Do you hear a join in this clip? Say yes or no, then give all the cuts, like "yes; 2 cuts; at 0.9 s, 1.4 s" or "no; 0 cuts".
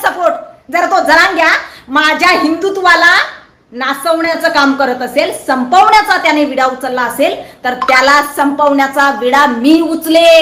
no; 0 cuts